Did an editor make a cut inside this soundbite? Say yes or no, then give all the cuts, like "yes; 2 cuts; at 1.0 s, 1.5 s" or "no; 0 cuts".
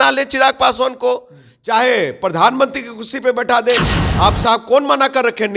yes; 1 cut; at 4.0 s